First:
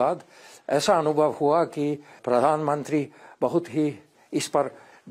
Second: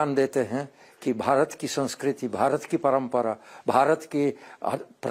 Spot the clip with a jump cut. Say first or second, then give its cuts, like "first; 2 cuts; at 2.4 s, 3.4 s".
first; 2 cuts; at 2.2 s, 4.1 s